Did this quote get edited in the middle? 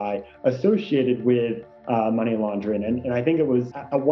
no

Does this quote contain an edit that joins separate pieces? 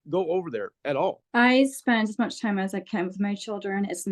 yes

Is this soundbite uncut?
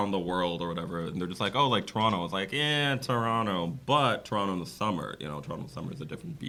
yes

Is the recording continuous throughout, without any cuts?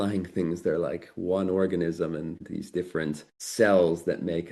no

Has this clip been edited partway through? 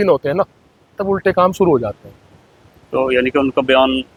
no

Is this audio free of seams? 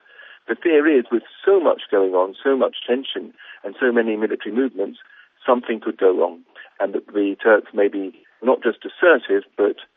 yes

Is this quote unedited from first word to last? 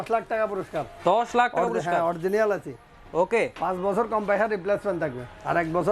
yes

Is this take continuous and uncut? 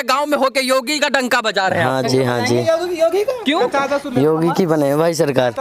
yes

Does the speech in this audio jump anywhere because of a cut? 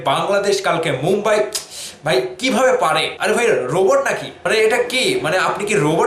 yes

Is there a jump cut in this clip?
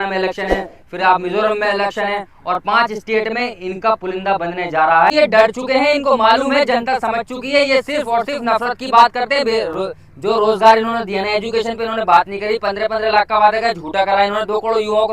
yes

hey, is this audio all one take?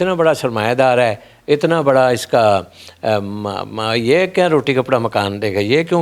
yes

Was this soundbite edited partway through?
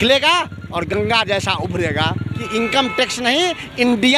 yes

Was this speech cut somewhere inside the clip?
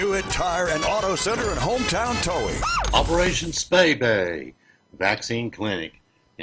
yes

